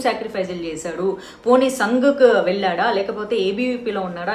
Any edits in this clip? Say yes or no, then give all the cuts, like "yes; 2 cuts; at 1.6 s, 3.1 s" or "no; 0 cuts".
no; 0 cuts